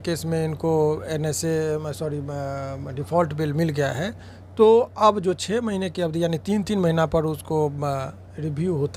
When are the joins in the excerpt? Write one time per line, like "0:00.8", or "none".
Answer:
none